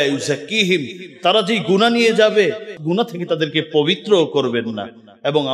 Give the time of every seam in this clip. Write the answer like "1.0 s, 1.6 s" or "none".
2.7 s